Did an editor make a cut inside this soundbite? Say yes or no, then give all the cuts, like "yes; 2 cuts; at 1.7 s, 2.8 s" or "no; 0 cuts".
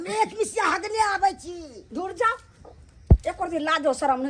no; 0 cuts